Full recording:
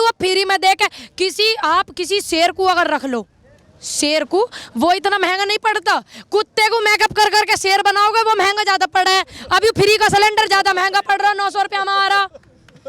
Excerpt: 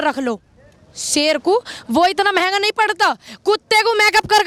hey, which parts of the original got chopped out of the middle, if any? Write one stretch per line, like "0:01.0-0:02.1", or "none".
none